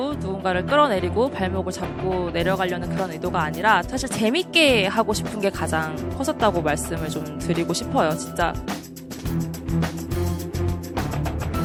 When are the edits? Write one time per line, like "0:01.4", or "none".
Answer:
none

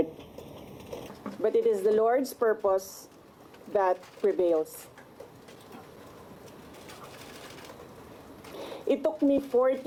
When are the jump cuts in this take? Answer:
none

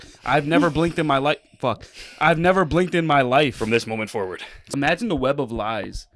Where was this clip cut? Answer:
0:04.7

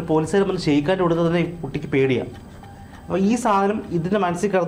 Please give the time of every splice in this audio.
none

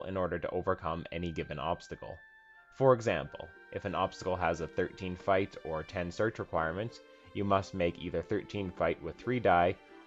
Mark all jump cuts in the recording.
0:05.0

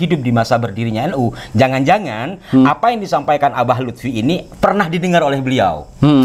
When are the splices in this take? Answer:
none

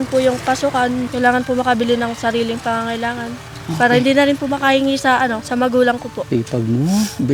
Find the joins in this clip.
0:01.1
0:05.4
0:06.2

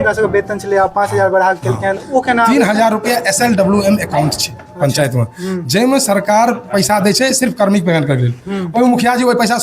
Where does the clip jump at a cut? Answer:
none

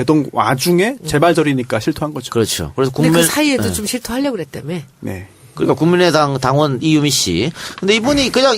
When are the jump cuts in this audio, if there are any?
0:03.7

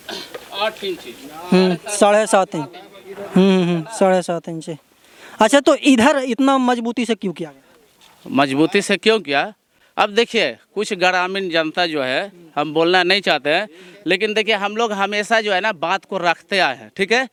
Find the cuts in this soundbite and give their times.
none

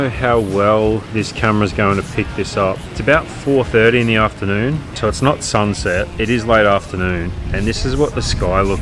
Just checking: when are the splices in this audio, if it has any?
0:01.1
0:02.9
0:06.1
0:07.5

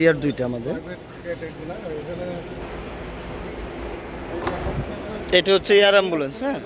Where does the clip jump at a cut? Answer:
0:02.6

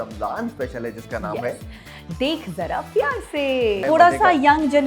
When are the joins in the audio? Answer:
0:03.8

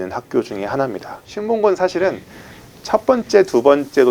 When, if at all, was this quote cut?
0:01.2

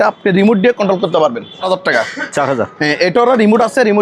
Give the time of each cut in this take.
0:01.7

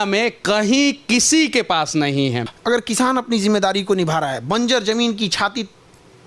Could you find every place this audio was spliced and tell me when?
0:02.5

